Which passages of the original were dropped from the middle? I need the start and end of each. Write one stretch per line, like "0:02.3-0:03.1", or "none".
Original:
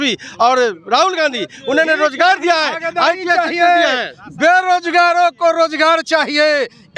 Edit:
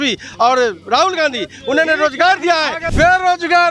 0:02.8-0:04.2